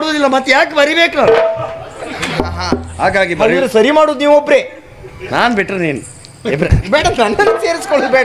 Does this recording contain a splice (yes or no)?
no